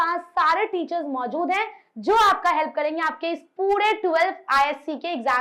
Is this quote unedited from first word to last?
yes; 0 cuts

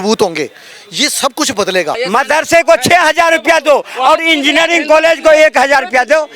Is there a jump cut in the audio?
yes; 1 cut; at 2.0 s

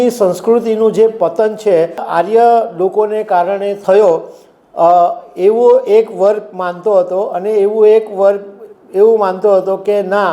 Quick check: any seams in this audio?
yes; 2 cuts; at 2.0 s, 3.8 s

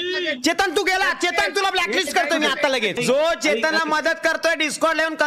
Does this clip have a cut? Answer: yes; 1 cut; at 3.0 s

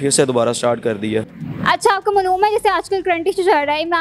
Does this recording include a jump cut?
yes; 1 cut; at 1.4 s

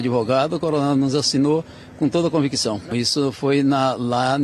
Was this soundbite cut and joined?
yes; 1 cut; at 2.9 s

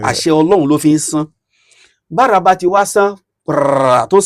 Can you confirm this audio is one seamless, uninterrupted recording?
yes; 0 cuts

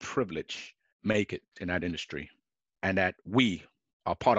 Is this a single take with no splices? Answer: yes; 0 cuts

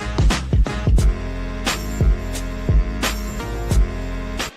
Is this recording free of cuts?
no; 1 cut; at 1.5 s

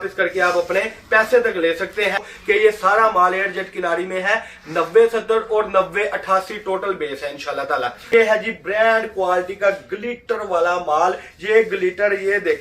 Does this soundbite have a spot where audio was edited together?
yes; 2 cuts; at 2.3 s, 8.0 s

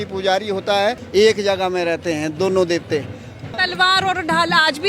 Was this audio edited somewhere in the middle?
yes; 2 cuts; at 1.0 s, 3.6 s

